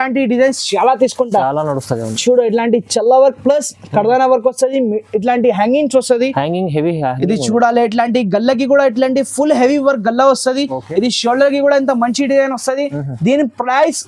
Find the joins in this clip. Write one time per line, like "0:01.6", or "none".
none